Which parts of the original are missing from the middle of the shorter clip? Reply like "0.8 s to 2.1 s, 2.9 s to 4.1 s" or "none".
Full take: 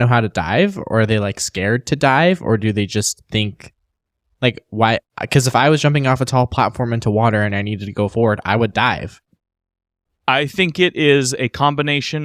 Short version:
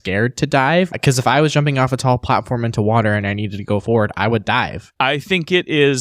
2.4 s to 5.2 s, 9.1 s to 10.1 s